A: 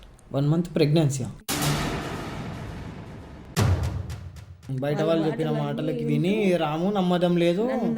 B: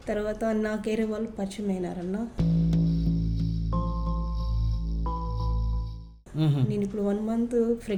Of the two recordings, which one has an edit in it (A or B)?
A